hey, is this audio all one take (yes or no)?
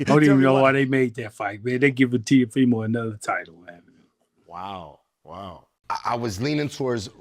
no